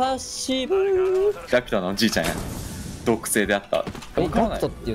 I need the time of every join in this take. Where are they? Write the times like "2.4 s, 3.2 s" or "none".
1.4 s, 4.0 s